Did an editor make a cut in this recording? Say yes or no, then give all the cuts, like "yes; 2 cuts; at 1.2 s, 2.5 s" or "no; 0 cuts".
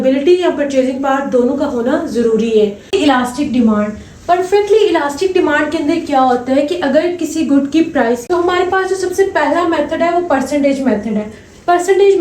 yes; 2 cuts; at 2.9 s, 8.2 s